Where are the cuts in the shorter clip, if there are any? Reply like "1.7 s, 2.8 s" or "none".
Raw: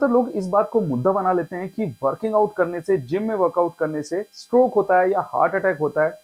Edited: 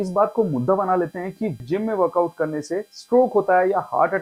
1.6 s